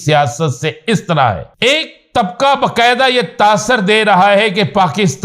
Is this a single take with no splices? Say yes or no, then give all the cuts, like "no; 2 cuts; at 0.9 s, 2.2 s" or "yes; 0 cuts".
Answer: no; 1 cut; at 1.5 s